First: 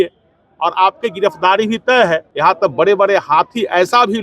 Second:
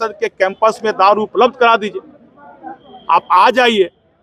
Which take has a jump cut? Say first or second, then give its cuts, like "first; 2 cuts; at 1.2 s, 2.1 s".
first; 1 cut; at 2.3 s